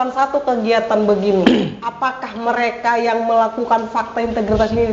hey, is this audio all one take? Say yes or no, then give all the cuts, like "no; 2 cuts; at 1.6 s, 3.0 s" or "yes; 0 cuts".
yes; 0 cuts